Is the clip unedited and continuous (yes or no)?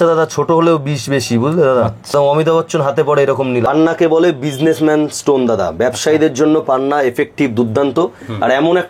no